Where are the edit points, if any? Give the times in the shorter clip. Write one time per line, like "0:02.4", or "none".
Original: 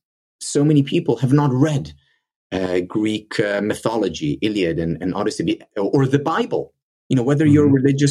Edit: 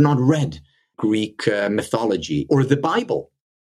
0:01.0
0:02.5